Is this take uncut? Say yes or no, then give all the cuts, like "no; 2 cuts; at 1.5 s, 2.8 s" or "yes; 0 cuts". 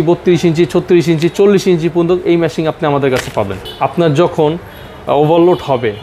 no; 1 cut; at 3.6 s